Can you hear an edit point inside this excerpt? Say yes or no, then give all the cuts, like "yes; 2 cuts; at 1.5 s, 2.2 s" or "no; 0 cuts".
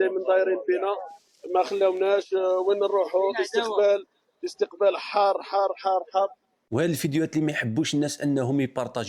yes; 1 cut; at 6.6 s